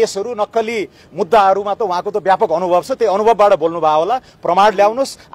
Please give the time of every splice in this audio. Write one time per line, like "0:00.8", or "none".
none